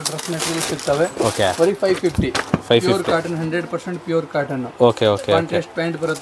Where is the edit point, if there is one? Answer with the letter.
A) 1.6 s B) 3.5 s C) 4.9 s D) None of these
D